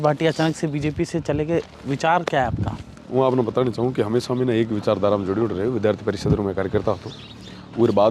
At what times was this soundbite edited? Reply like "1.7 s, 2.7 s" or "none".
none